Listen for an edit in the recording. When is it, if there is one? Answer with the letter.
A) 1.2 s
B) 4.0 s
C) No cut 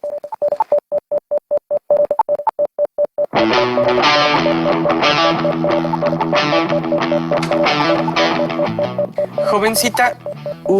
A